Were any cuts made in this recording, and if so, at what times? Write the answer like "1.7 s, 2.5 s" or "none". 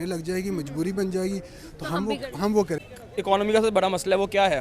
2.9 s